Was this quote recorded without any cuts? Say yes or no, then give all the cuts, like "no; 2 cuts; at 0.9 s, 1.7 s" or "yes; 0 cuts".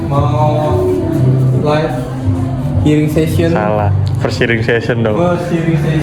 yes; 0 cuts